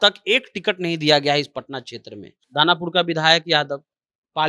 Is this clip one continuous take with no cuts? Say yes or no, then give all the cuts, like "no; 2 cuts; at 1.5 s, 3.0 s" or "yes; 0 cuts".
no; 1 cut; at 2.4 s